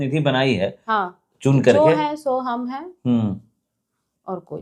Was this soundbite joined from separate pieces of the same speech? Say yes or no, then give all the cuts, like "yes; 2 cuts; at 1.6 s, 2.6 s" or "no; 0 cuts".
no; 0 cuts